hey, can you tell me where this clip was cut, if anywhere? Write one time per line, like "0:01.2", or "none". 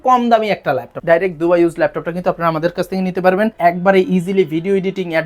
0:00.9
0:03.5